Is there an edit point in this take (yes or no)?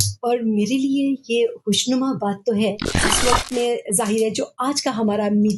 yes